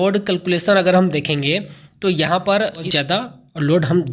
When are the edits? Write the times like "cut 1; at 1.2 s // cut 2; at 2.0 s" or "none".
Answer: cut 1; at 2.9 s